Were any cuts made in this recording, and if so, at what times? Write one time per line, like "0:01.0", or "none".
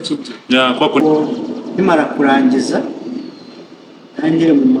0:01.0